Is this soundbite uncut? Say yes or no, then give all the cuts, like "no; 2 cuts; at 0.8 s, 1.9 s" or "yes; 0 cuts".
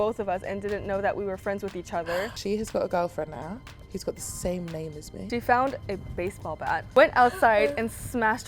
no; 4 cuts; at 2.3 s, 3.7 s, 5.1 s, 6.8 s